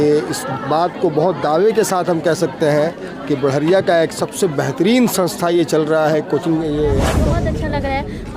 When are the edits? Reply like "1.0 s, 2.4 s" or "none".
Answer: 7.2 s